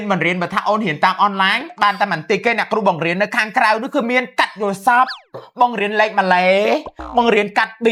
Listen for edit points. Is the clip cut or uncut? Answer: uncut